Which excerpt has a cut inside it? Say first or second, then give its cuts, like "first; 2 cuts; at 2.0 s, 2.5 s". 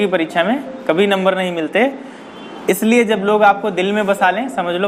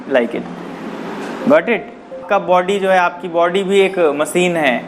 second; 1 cut; at 2.2 s